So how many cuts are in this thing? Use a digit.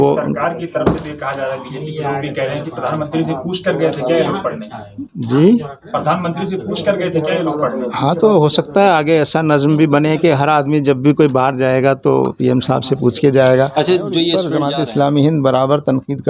1